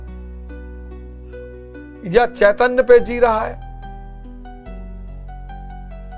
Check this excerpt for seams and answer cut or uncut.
uncut